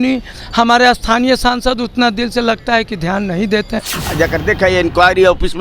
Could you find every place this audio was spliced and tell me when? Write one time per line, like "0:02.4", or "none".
0:04.0